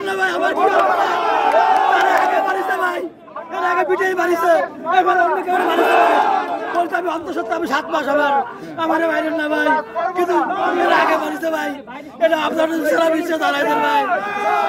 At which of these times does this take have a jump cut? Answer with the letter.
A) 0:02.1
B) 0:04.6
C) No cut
C